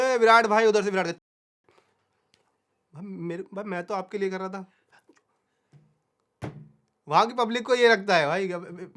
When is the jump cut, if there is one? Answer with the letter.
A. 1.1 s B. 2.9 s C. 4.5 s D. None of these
D